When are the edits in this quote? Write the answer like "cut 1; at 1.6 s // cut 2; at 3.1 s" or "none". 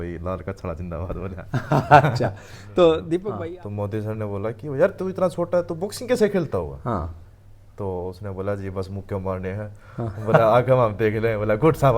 cut 1; at 3.3 s